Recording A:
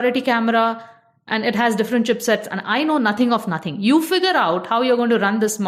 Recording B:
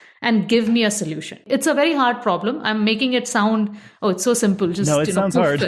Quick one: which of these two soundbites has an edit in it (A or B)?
B